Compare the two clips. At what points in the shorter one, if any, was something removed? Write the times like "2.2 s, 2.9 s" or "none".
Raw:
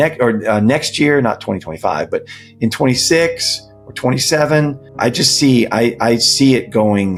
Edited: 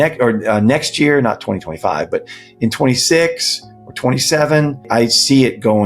4.9 s